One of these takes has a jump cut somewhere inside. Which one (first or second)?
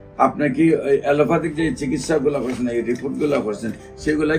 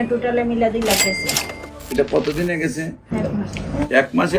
second